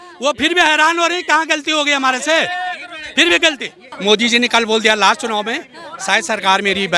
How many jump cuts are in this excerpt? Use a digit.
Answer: 1